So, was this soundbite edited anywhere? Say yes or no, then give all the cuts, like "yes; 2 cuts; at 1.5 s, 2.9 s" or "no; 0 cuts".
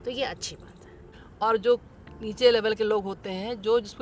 yes; 1 cut; at 1.2 s